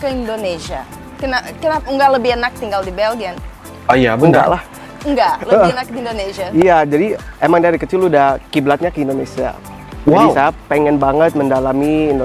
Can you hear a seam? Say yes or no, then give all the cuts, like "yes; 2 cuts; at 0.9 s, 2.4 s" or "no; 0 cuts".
no; 0 cuts